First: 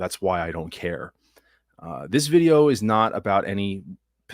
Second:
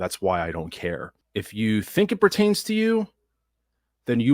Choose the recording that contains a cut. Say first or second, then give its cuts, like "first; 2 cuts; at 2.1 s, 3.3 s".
second; 1 cut; at 1.2 s